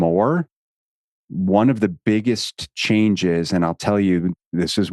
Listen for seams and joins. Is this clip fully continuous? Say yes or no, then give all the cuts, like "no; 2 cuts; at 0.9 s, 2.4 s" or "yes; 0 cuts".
yes; 0 cuts